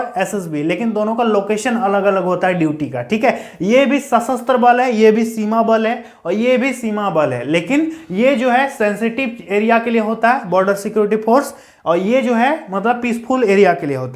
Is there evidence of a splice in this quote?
no; 0 cuts

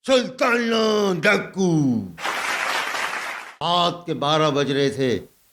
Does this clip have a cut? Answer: yes; 1 cut; at 3.5 s

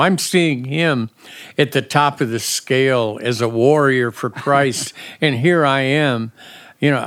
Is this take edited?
no; 0 cuts

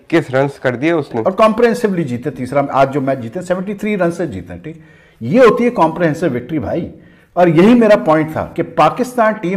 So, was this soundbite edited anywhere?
yes; 1 cut; at 1.2 s

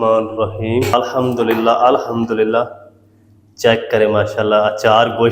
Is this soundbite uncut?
no; 1 cut; at 0.9 s

